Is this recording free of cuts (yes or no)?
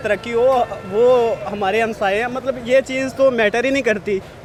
yes